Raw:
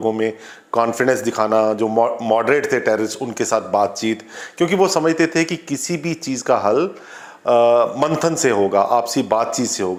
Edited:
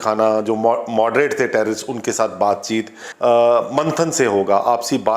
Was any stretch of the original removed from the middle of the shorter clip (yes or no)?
yes